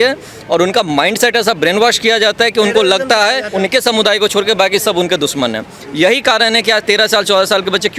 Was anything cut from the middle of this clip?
yes; 1 cut; at 3.5 s

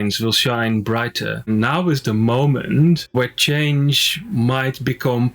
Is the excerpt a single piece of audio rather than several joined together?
no; 1 cut; at 1.5 s

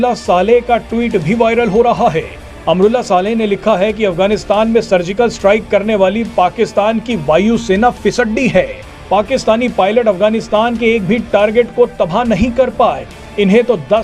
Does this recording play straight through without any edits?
yes; 0 cuts

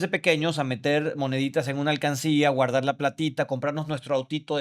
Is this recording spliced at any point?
no; 0 cuts

